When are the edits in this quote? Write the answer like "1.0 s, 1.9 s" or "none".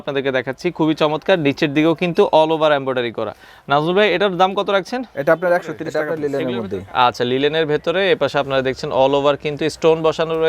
6.2 s